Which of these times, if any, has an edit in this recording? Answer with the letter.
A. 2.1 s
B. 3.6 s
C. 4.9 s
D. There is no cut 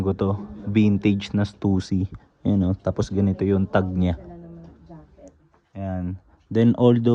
D